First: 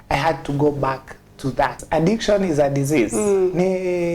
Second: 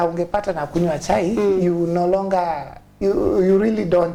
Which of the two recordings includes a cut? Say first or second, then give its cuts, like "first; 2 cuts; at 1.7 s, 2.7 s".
first; 1 cut; at 1.8 s